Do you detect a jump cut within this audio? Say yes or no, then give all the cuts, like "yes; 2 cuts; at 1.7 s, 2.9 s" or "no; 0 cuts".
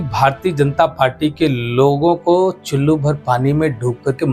no; 0 cuts